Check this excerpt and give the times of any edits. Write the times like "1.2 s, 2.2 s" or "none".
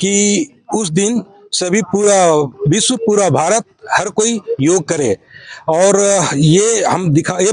none

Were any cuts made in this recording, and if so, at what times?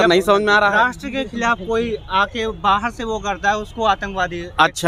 none

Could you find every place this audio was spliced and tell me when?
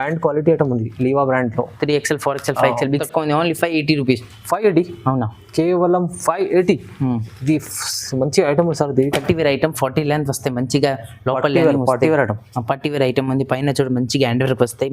3.0 s, 9.2 s

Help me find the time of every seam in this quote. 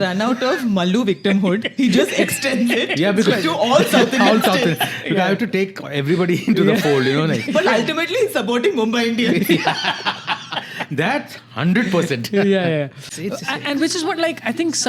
13.1 s

